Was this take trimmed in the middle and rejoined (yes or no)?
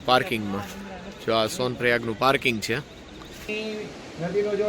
yes